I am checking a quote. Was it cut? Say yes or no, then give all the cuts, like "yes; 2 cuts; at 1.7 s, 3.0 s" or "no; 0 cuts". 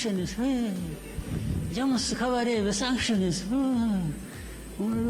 no; 0 cuts